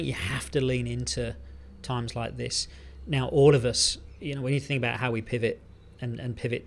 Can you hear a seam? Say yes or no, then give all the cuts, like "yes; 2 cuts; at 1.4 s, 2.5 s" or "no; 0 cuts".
no; 0 cuts